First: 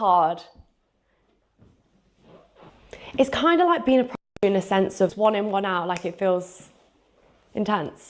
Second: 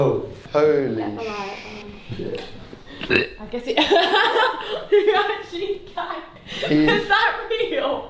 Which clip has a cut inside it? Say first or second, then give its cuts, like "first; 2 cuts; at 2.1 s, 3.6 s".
first; 2 cuts; at 2.7 s, 5.1 s